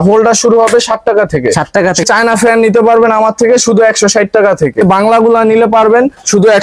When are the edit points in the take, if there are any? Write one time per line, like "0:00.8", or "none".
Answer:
0:02.1
0:04.8